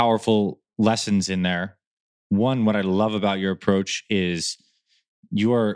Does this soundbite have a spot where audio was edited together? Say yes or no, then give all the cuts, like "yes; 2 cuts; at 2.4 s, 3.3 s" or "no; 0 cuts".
no; 0 cuts